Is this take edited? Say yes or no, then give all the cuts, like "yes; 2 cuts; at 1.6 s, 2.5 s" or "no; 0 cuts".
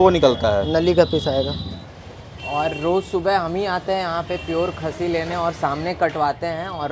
yes; 1 cut; at 1.9 s